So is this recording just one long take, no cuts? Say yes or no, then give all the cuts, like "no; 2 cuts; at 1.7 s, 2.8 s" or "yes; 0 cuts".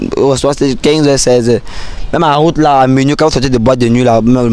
yes; 0 cuts